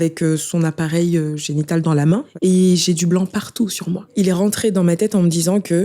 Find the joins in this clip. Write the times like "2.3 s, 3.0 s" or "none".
2.3 s, 4.1 s